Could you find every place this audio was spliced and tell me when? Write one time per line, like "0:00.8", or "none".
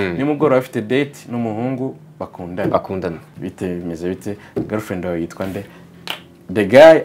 0:03.3